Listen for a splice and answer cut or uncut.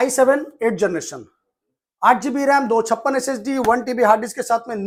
uncut